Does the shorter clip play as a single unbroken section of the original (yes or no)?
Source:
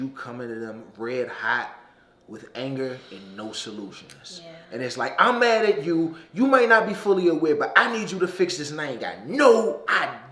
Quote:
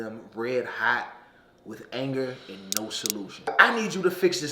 no